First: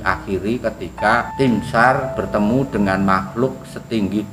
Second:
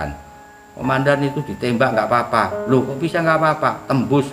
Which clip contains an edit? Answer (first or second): first